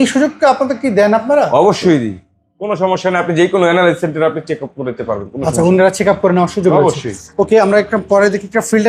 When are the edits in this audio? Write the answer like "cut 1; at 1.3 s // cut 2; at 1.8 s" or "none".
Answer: none